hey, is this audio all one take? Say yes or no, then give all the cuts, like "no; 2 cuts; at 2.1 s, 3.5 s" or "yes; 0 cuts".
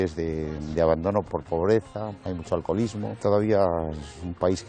no; 3 cuts; at 1.3 s, 2.1 s, 3.2 s